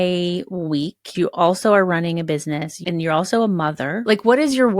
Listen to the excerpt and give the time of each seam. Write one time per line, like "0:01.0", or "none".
0:01.1
0:02.7
0:04.0